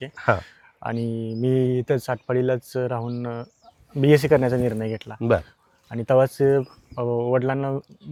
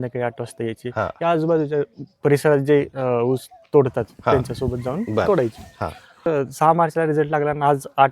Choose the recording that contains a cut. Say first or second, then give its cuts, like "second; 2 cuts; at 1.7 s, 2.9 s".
second; 1 cut; at 6.3 s